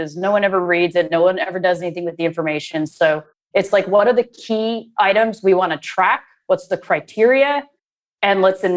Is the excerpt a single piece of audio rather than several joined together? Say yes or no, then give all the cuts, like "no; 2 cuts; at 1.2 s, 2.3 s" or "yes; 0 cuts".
yes; 0 cuts